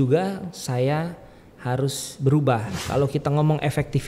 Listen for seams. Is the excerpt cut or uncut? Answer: cut